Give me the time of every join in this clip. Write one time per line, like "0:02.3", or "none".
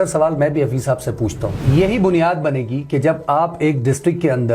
0:01.6